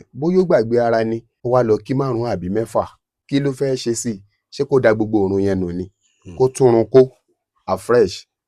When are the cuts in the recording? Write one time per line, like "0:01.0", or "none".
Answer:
0:01.3